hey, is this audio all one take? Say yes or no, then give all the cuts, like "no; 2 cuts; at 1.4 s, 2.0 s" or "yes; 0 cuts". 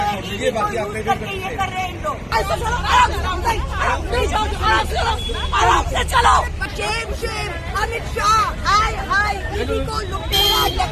no; 2 cuts; at 2.2 s, 6.6 s